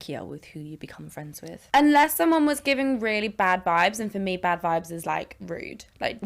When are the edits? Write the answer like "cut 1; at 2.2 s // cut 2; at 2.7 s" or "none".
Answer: cut 1; at 1.6 s